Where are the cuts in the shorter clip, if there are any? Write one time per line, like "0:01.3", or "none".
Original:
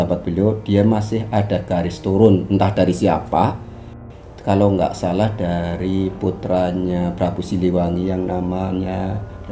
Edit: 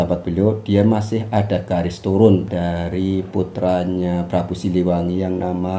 0:02.5